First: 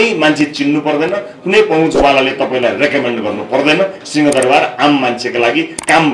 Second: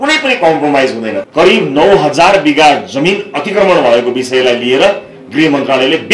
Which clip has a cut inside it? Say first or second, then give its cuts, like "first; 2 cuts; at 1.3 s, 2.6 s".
second; 1 cut; at 1.2 s